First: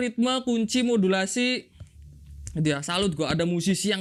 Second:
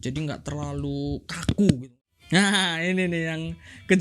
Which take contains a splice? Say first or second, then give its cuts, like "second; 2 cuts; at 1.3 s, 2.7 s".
second; 1 cut; at 1.9 s